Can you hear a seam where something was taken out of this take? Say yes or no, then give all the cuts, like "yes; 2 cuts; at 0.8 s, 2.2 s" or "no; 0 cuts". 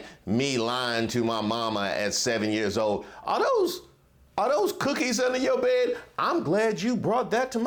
no; 0 cuts